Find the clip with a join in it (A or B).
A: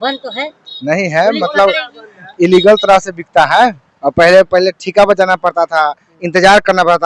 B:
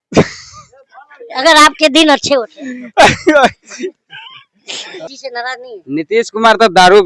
B